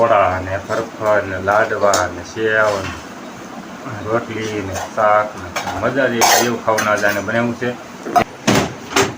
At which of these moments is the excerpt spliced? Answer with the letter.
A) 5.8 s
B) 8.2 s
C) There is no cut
B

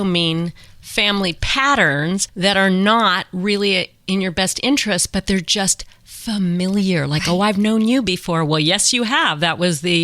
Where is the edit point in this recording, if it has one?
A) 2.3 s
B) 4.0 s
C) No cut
A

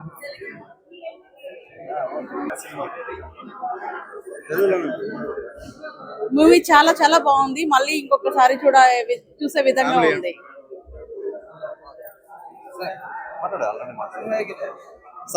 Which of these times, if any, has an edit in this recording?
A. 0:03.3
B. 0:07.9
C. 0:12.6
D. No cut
B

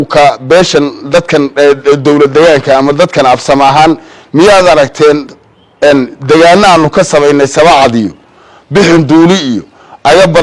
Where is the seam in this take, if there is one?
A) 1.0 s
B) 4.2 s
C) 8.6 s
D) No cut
D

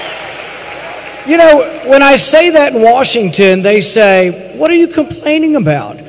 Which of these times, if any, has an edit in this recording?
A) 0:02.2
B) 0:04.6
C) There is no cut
A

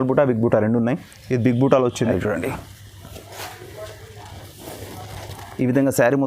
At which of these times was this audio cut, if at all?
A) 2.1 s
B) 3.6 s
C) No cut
A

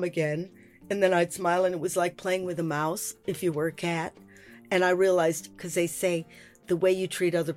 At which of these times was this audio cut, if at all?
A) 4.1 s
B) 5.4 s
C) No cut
B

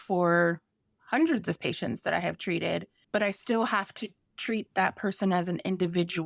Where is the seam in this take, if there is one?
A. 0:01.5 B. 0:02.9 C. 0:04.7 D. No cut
B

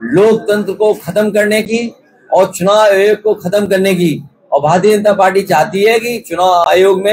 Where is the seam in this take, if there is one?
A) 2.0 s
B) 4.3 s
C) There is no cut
C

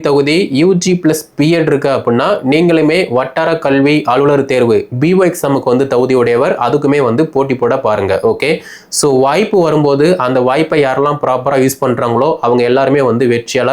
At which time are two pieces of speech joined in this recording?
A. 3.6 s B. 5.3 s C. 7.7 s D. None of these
D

